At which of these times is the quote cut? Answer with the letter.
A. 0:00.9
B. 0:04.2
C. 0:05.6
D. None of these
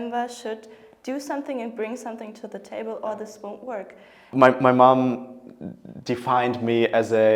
B